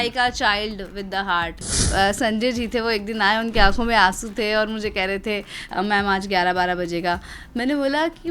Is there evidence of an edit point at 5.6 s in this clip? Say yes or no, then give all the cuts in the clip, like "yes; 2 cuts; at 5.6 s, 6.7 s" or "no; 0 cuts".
yes; 2 cuts; at 1.8 s, 5.6 s